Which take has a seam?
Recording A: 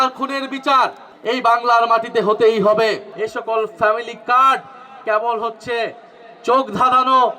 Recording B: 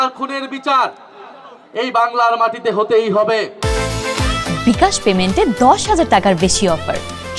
A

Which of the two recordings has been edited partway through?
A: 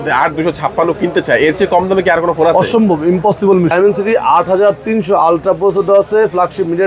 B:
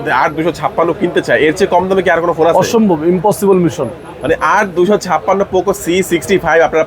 A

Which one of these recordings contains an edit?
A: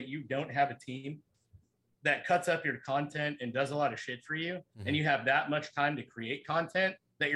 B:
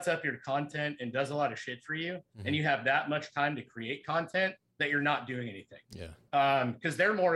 B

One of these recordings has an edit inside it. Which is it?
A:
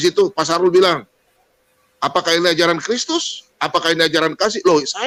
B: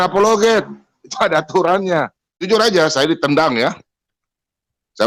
B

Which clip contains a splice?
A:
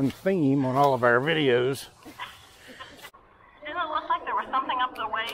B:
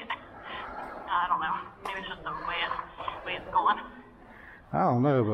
A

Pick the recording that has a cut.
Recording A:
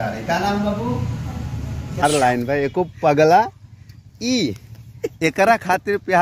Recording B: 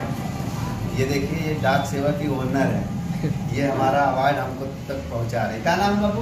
A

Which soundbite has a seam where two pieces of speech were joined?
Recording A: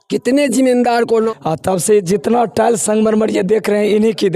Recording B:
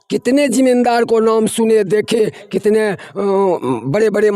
A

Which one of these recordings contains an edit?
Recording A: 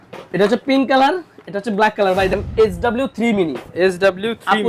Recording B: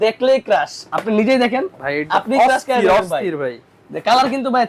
A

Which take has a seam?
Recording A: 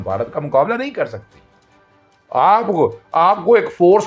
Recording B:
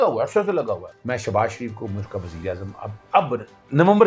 B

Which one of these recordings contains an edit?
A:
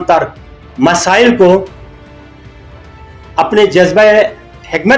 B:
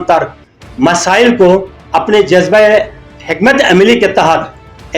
B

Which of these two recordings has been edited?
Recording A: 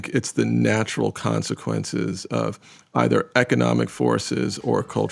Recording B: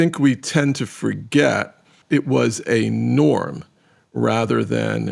B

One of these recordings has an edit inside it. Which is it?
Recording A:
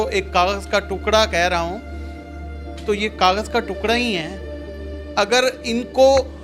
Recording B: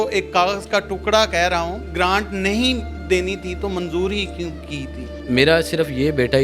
B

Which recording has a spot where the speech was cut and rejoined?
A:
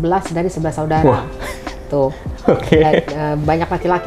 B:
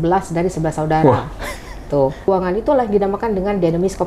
B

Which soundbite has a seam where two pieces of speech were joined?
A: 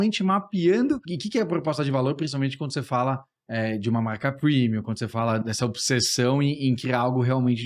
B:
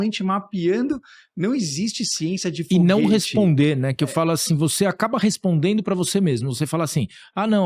A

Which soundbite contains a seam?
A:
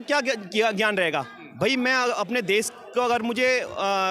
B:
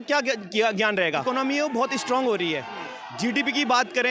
B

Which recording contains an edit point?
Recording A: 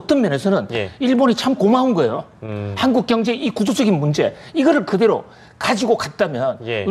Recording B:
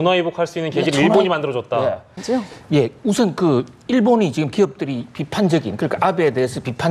B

